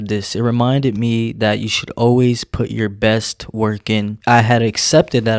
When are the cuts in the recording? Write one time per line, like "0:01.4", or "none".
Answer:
0:04.1